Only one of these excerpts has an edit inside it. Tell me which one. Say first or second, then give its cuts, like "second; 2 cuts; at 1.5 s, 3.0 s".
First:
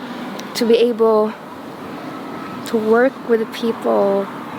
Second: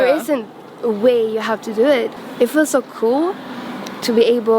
second; 1 cut; at 2.1 s